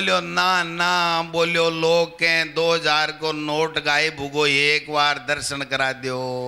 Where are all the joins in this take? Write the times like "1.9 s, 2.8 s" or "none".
none